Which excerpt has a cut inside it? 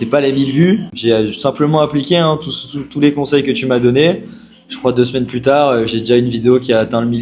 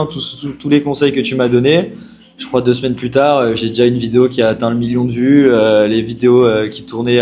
first; 1 cut; at 0.9 s

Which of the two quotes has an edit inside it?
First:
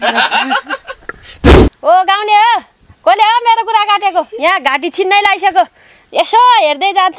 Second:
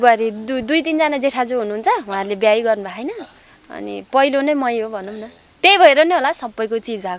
first; 1 cut; at 1.6 s

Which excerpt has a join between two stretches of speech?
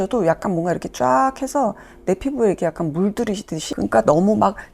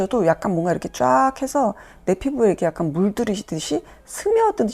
first; 1 cut; at 3.6 s

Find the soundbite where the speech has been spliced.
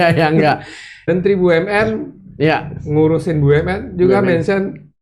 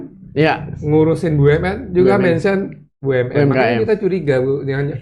first; 1 cut; at 1.1 s

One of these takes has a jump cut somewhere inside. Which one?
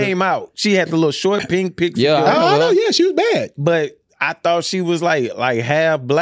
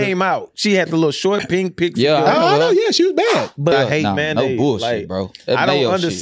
second; 1 cut; at 3.7 s

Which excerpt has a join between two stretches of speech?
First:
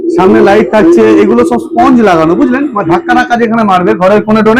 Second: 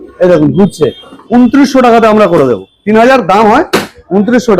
second; 1 cut; at 1.2 s

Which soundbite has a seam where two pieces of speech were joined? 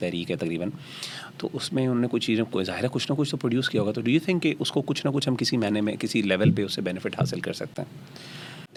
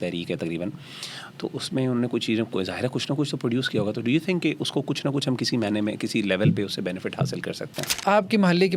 second; 1 cut; at 7.8 s

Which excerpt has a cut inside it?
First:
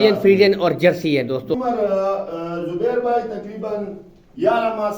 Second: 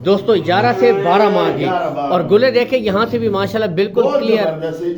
first; 1 cut; at 1.5 s

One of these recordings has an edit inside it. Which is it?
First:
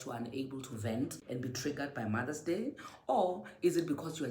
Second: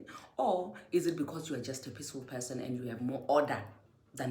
first; 1 cut; at 1.2 s

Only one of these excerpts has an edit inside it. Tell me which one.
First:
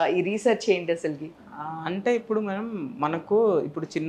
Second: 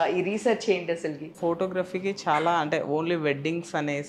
second; 1 cut; at 1.3 s

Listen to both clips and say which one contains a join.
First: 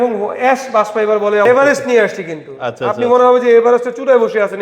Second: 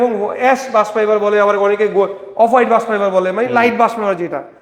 first; 1 cut; at 1.5 s

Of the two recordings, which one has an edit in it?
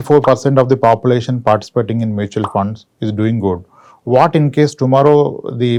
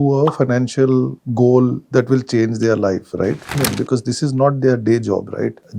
second; 1 cut; at 3.6 s

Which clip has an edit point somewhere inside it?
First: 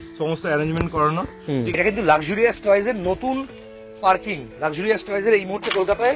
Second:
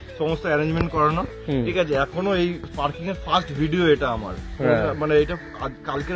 first; 1 cut; at 1.7 s

